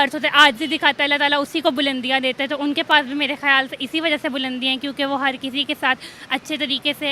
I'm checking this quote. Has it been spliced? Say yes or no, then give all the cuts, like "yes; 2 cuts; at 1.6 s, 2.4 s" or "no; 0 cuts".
no; 0 cuts